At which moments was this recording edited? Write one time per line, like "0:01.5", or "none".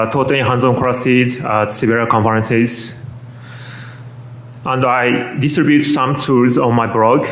0:01.0